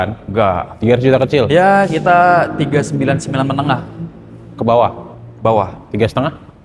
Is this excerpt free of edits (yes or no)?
yes